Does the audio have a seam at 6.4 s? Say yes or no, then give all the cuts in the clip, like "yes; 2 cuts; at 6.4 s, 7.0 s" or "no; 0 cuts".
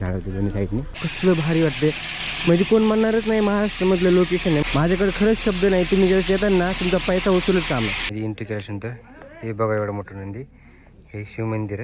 no; 3 cuts; at 1.1 s, 4.6 s, 8.0 s